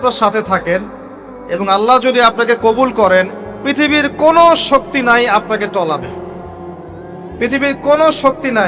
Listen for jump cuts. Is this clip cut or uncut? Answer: uncut